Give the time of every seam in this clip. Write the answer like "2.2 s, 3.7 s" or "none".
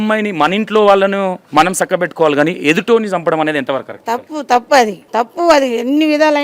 1.4 s, 5.0 s